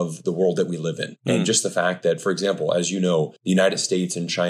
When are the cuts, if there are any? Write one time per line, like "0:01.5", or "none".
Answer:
none